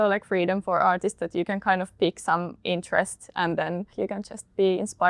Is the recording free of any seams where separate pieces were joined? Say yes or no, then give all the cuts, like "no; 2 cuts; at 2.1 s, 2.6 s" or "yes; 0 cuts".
yes; 0 cuts